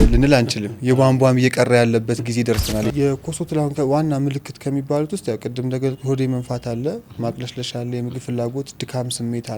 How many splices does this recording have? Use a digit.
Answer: 1